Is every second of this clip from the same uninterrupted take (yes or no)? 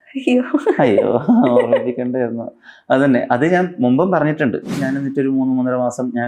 no